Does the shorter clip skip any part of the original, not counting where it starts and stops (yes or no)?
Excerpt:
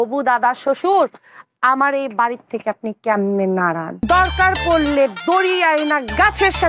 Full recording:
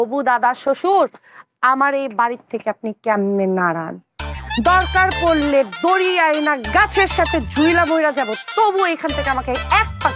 yes